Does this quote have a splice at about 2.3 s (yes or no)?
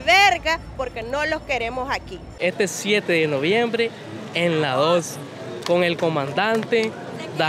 yes